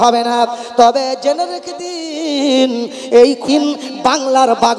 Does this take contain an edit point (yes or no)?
yes